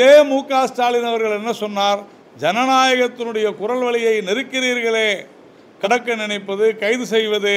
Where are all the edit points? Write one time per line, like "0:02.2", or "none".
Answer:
0:05.9